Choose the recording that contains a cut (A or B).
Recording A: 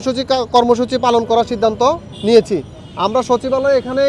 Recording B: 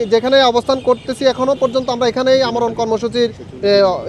A